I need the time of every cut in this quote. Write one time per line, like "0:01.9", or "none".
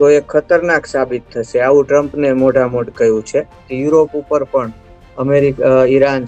0:03.6